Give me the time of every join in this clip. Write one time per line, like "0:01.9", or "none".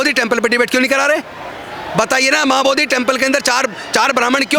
none